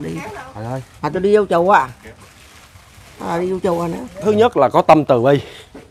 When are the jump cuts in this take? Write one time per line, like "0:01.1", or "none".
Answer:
0:04.1